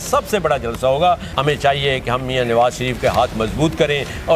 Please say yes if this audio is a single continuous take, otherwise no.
no